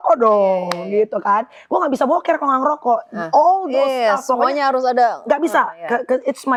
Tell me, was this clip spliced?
no; 0 cuts

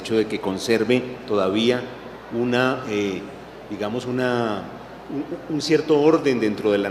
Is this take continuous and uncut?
no; 1 cut; at 4.9 s

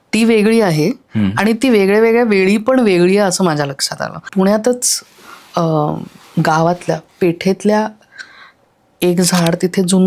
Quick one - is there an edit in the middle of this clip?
yes; 1 cut; at 4.3 s

